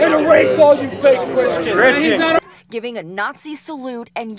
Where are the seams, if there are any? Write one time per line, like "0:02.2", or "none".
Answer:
none